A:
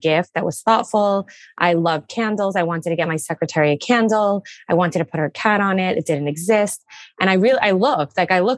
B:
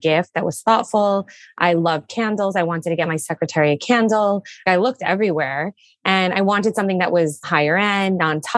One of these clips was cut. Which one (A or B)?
B